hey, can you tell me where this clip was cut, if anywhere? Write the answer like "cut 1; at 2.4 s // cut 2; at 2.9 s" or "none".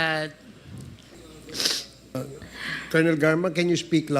cut 1; at 1.3 s